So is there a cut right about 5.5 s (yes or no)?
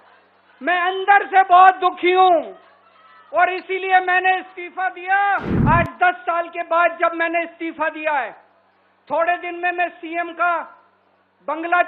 yes